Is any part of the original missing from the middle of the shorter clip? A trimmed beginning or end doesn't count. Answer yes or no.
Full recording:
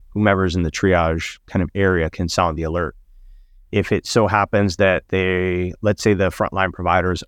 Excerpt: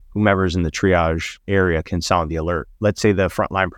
yes